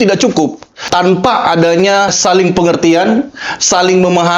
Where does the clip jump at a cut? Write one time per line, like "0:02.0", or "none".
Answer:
0:00.8
0:02.2